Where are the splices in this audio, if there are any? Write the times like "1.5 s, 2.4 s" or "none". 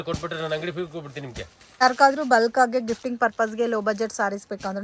1.8 s